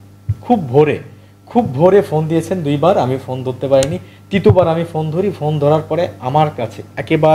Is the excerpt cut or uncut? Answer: uncut